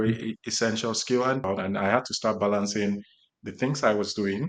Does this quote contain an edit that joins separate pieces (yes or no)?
yes